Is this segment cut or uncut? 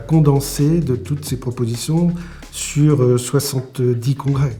uncut